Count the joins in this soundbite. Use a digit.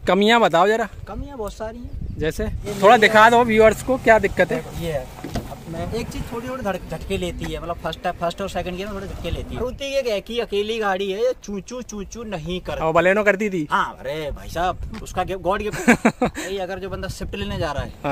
4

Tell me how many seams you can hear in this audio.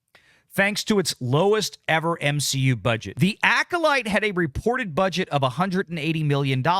1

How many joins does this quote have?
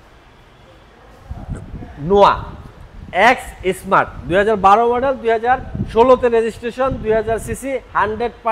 0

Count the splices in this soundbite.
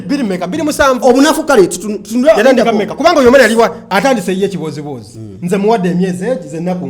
1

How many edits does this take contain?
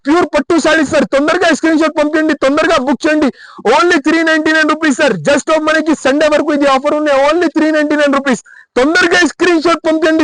0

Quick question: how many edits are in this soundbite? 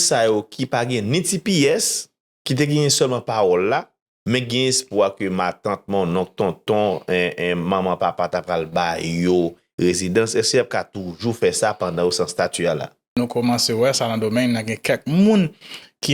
1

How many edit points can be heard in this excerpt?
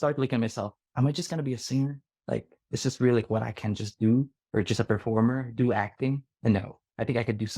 3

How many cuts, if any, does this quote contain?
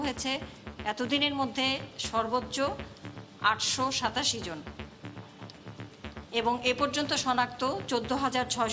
0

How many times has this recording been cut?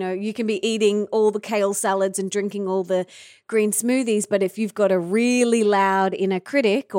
0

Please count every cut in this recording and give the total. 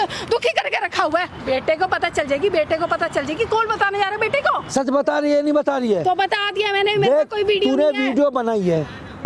2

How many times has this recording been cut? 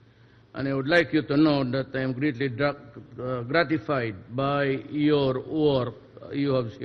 1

